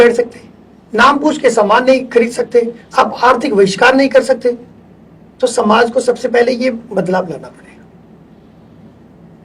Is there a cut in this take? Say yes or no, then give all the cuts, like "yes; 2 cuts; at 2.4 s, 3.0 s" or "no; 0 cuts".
no; 0 cuts